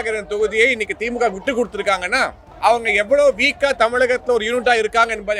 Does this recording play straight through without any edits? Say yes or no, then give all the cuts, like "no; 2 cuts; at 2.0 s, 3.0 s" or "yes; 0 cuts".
yes; 0 cuts